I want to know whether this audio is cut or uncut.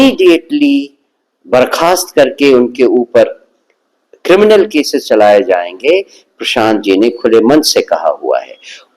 cut